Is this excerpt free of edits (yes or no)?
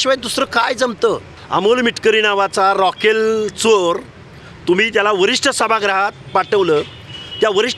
no